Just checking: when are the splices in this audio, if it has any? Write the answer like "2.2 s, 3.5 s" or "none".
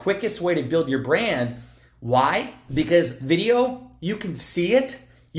2.6 s